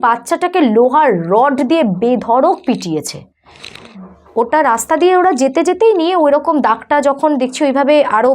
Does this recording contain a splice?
no; 0 cuts

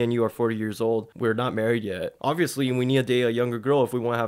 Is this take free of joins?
no; 2 cuts; at 1.1 s, 2.1 s

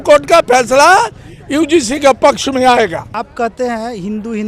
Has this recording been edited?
yes; 1 cut; at 3.1 s

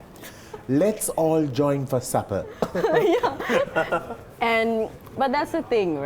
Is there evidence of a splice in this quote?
no; 0 cuts

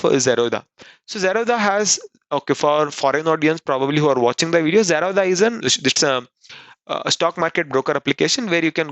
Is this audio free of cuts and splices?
no; 1 cut; at 5.6 s

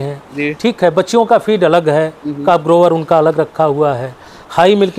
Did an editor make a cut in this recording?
no; 0 cuts

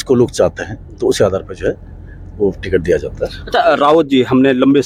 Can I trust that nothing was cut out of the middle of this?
yes; 0 cuts

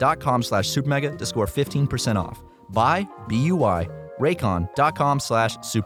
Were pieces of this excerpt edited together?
no; 0 cuts

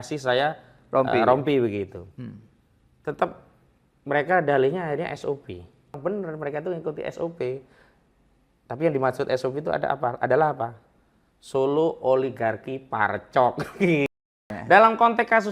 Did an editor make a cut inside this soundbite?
yes; 2 cuts; at 5.9 s, 14.5 s

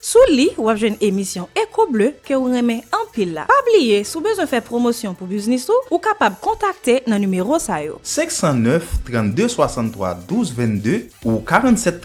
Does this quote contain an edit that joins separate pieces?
no; 0 cuts

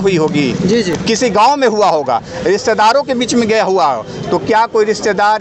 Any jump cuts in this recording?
no; 0 cuts

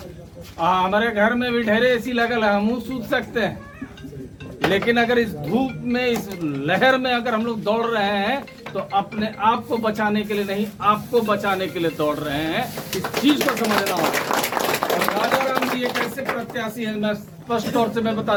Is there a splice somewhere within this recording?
no; 0 cuts

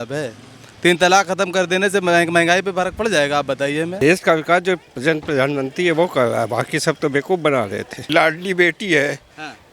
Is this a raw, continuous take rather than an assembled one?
no; 2 cuts; at 3.9 s, 8.0 s

